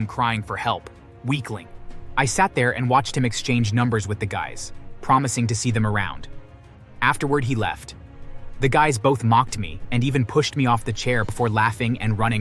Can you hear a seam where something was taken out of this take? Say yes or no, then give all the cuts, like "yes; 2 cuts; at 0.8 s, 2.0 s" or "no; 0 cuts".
yes; 1 cut; at 11.3 s